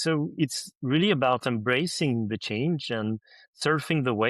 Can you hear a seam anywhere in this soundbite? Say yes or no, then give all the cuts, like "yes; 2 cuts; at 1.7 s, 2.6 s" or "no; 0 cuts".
no; 0 cuts